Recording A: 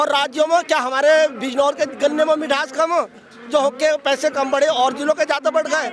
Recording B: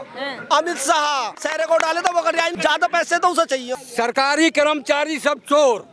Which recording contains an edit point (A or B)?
B